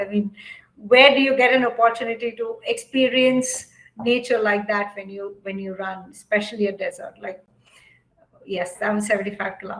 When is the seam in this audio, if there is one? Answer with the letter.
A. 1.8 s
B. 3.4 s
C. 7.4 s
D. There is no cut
C